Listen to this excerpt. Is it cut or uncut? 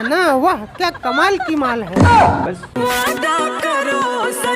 cut